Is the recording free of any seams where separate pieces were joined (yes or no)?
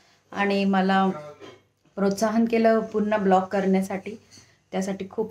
yes